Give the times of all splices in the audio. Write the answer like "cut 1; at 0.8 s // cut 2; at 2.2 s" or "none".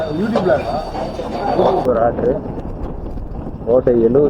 cut 1; at 1.8 s

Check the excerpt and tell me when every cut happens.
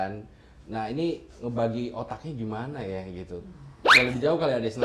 none

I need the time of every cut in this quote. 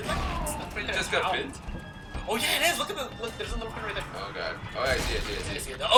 none

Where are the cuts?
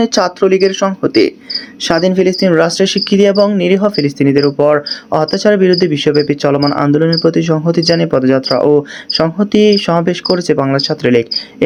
none

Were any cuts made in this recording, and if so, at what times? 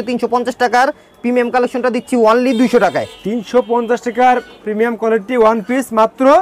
none

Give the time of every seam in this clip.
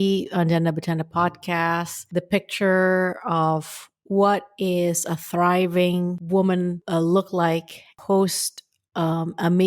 cut 1; at 2.0 s // cut 2; at 6.2 s // cut 3; at 6.8 s // cut 4; at 7.9 s

